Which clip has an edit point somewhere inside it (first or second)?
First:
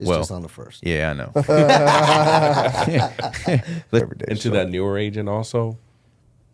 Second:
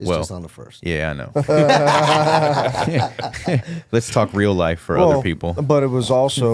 first